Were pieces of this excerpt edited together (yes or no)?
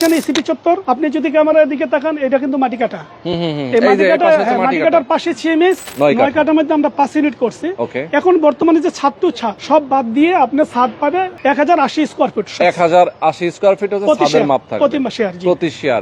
yes